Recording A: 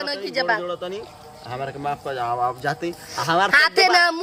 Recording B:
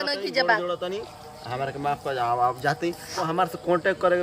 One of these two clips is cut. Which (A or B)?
B